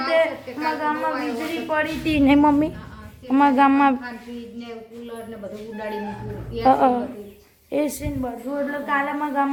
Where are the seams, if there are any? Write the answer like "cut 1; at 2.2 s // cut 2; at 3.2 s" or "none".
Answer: none